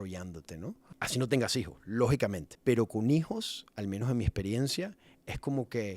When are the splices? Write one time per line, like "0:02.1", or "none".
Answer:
0:00.8
0:02.5